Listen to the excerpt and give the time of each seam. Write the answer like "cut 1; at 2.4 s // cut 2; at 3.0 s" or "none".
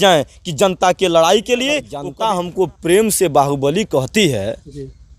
cut 1; at 2.0 s